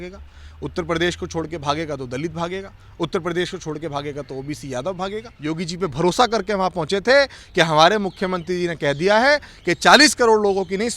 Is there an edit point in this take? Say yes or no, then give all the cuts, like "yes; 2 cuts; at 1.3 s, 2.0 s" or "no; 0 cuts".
yes; 1 cut; at 5.3 s